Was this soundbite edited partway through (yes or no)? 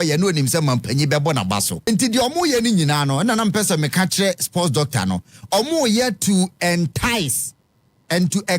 yes